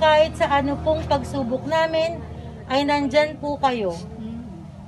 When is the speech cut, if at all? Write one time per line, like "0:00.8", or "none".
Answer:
none